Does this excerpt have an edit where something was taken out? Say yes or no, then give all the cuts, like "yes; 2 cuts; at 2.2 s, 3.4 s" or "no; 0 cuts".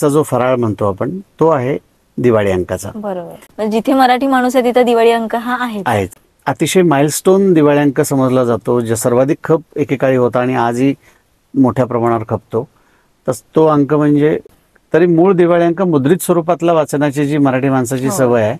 yes; 3 cuts; at 3.4 s, 6.2 s, 14.5 s